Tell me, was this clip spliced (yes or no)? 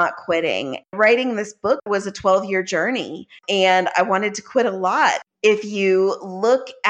yes